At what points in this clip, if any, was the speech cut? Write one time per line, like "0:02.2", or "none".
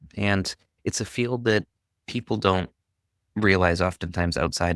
none